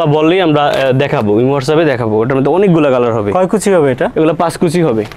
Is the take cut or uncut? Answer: uncut